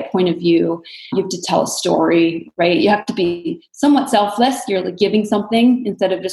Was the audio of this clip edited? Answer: no; 0 cuts

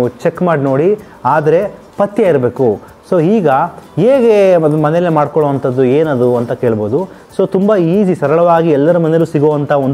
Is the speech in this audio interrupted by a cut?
no; 0 cuts

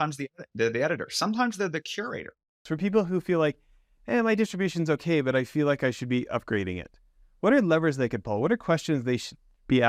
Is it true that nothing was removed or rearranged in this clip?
no; 1 cut; at 2.5 s

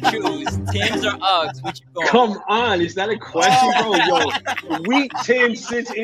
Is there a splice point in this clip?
no; 0 cuts

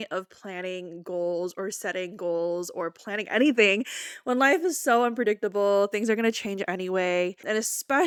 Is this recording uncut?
yes; 0 cuts

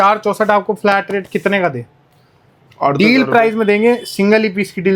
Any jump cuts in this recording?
no; 0 cuts

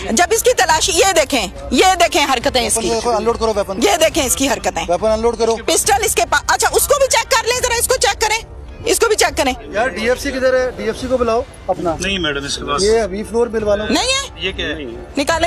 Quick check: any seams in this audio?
no; 0 cuts

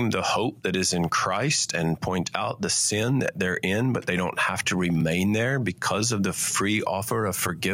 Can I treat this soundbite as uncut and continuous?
yes; 0 cuts

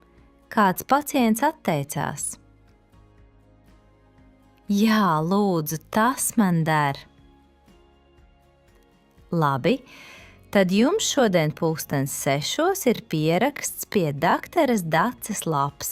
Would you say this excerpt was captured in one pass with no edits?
no; 2 cuts; at 2.4 s, 4.1 s

